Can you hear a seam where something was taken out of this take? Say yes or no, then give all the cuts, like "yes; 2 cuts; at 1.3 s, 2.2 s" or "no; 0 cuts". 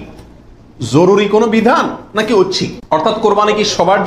yes; 1 cut; at 2.7 s